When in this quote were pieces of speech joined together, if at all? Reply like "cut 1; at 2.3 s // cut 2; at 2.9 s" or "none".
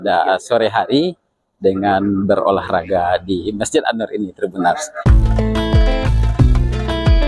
cut 1; at 5.0 s